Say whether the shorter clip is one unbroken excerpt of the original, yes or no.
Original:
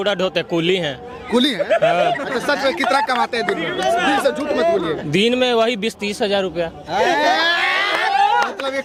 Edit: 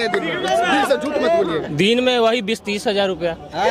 yes